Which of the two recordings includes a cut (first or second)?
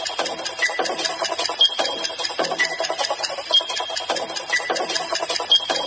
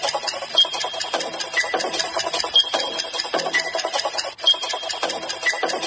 second